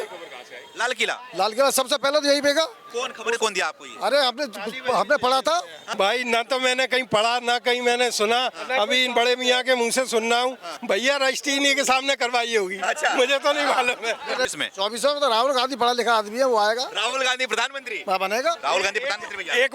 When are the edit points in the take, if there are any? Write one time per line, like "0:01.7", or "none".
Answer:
0:05.8
0:10.7
0:14.5